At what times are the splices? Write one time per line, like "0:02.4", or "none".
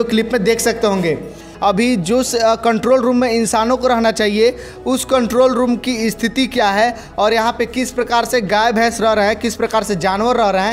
0:01.5

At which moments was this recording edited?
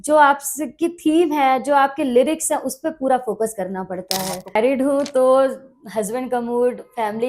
0:04.6

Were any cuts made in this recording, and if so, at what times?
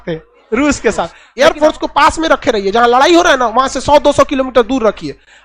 0:01.2

